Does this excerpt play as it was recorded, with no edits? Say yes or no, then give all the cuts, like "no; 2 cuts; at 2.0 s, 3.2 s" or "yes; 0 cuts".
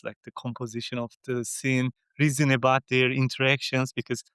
yes; 0 cuts